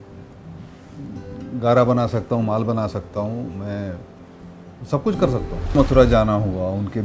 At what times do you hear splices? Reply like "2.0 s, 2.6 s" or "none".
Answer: 5.8 s